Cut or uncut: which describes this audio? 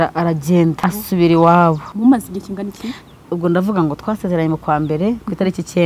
cut